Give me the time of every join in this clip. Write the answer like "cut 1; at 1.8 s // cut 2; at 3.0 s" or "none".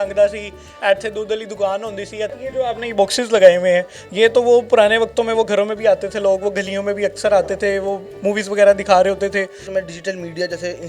cut 1; at 2.4 s // cut 2; at 9.7 s